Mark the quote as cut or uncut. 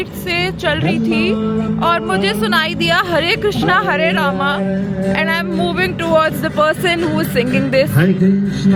uncut